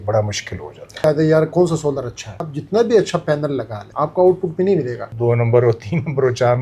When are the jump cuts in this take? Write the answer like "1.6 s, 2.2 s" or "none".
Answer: 1.0 s, 2.5 s, 3.8 s, 5.0 s

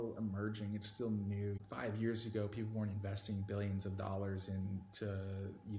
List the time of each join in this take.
1.6 s

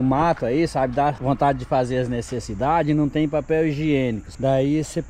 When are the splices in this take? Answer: 1.2 s, 4.3 s

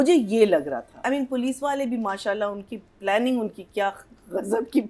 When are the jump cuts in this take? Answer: 1.0 s

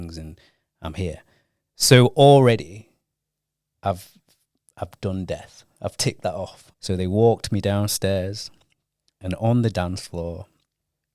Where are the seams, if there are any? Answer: 6.6 s

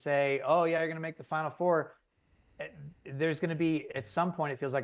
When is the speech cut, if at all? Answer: none

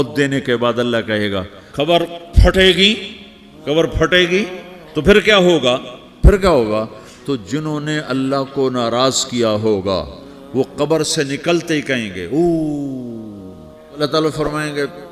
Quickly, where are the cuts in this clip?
1.6 s, 14.0 s

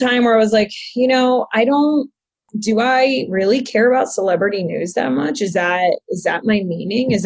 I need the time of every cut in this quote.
2.5 s

